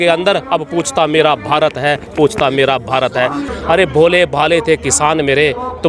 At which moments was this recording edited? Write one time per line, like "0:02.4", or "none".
0:03.5